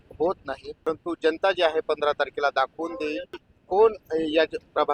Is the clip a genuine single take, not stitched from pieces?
no; 2 cuts; at 0.9 s, 3.5 s

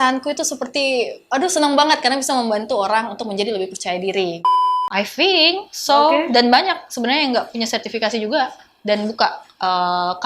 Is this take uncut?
no; 1 cut; at 4.4 s

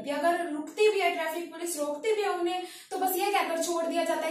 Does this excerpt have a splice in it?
no; 0 cuts

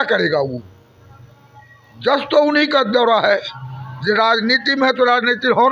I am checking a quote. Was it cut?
no; 0 cuts

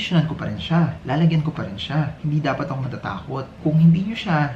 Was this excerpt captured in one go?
no; 1 cut; at 3.5 s

